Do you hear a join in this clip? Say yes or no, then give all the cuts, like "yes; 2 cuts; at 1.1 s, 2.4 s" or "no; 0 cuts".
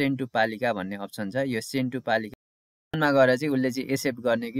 yes; 1 cut; at 3.0 s